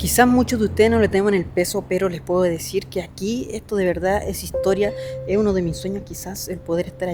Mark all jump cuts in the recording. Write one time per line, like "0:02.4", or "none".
none